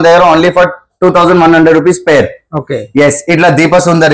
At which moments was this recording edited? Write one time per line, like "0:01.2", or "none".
none